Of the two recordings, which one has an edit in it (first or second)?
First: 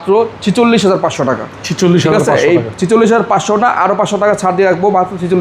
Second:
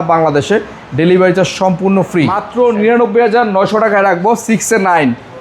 second